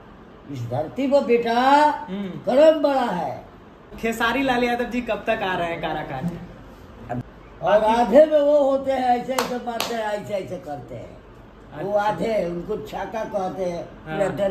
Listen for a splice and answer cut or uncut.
cut